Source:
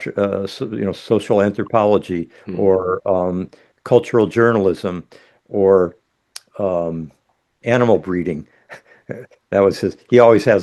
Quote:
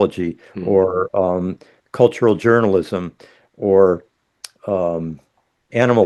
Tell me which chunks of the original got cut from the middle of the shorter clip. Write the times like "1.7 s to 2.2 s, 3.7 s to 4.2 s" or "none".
none